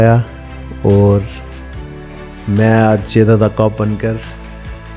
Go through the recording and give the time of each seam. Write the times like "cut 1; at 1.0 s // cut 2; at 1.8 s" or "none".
none